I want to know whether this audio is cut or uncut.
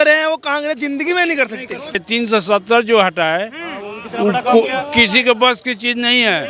cut